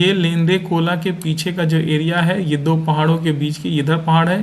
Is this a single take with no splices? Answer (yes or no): yes